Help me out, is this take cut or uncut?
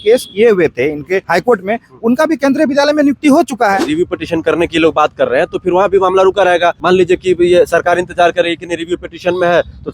cut